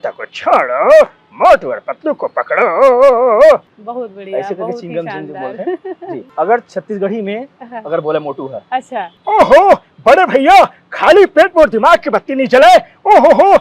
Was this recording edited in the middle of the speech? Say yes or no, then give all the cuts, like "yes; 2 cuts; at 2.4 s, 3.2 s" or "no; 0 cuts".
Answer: yes; 3 cuts; at 3.8 s, 6.3 s, 9.1 s